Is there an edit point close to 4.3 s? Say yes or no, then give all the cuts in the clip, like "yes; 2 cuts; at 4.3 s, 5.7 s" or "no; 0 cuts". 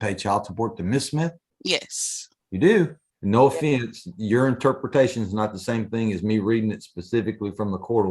no; 2 cuts; at 1.5 s, 3.1 s